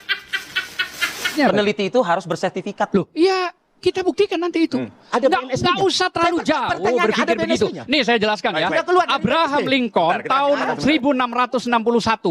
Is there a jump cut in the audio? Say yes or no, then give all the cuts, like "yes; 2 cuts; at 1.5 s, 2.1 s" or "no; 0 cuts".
yes; 1 cut; at 1.4 s